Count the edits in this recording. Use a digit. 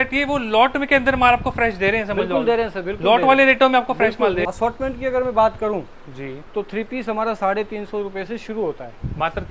1